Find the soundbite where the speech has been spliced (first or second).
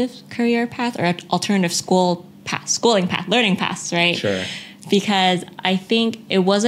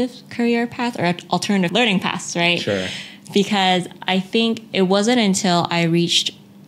second